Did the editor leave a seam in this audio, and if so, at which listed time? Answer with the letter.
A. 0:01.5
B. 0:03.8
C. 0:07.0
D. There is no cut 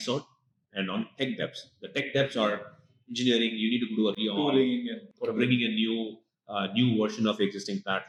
D